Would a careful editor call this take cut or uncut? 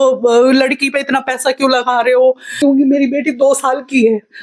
cut